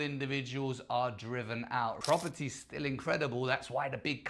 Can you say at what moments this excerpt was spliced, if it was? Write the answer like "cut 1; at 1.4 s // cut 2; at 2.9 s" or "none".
cut 1; at 2.0 s

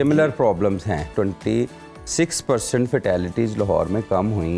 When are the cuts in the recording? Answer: cut 1; at 1.1 s

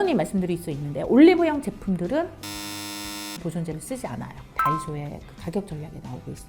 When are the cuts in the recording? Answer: cut 1; at 4.7 s

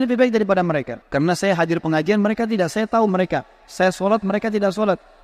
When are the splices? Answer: cut 1; at 1.0 s

